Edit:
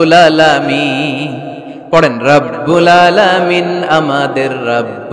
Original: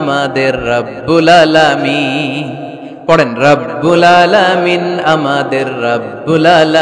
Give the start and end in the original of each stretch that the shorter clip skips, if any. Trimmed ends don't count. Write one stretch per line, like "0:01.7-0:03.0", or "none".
none